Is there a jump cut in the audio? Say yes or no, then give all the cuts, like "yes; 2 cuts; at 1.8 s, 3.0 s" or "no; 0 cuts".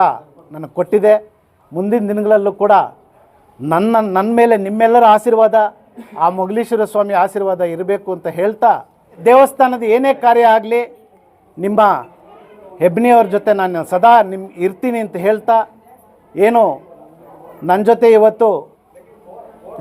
yes; 1 cut; at 9.2 s